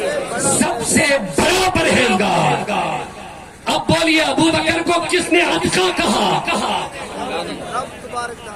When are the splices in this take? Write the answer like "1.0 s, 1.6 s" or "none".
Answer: none